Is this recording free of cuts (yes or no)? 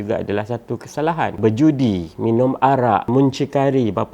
no